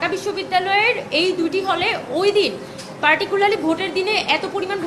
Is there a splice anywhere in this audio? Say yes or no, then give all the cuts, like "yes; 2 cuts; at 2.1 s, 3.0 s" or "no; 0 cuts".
no; 0 cuts